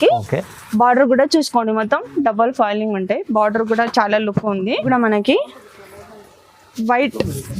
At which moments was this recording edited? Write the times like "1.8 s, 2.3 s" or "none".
4.9 s